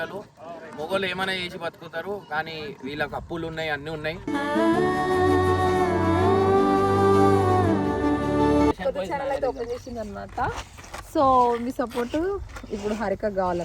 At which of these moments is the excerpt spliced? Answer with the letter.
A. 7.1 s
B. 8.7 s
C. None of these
B